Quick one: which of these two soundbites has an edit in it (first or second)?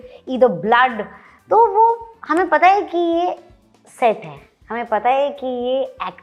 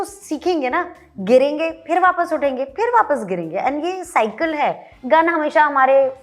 second